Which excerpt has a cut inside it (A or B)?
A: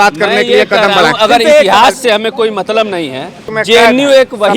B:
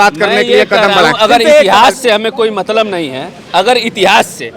A